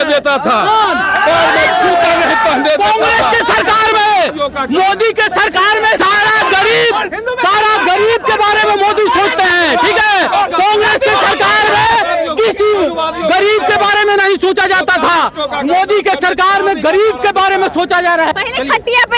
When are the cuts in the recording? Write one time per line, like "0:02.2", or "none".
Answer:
none